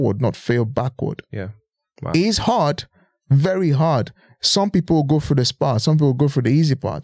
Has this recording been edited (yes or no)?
no